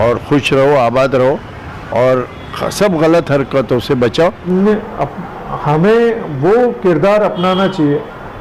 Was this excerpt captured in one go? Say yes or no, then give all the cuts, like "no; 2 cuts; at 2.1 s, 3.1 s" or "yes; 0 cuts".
no; 1 cut; at 4.4 s